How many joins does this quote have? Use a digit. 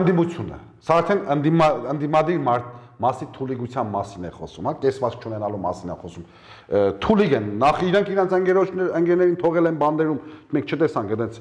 0